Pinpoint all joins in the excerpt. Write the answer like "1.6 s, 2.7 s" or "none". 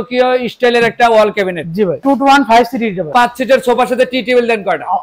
2.0 s, 3.1 s